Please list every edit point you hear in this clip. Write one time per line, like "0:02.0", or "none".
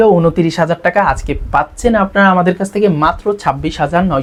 none

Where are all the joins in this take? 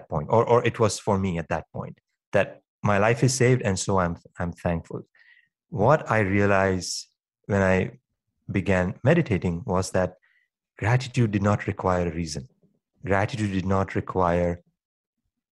0:08.3

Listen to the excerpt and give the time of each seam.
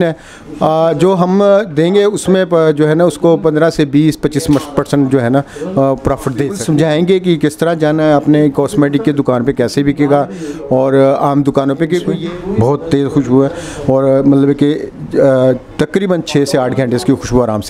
0:06.5
0:12.1

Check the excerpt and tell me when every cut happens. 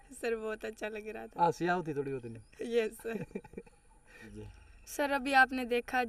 0:04.2

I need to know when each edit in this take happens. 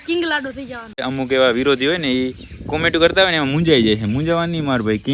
0:01.1

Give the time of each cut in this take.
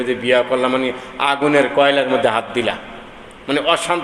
none

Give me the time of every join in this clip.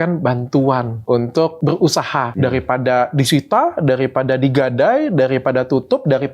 0:01.3
0:02.3

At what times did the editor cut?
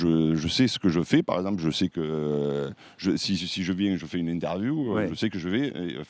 none

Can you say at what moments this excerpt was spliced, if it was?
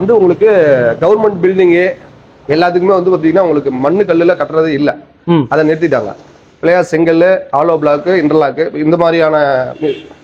none

